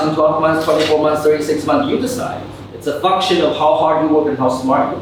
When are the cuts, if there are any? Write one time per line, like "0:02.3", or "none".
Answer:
none